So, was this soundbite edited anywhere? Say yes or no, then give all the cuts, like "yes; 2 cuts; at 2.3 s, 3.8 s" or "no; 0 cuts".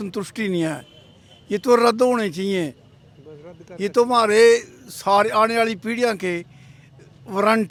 no; 0 cuts